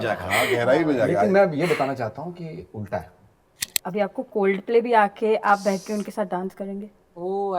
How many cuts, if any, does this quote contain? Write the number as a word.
one